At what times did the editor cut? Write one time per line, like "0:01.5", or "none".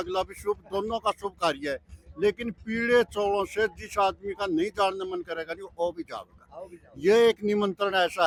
none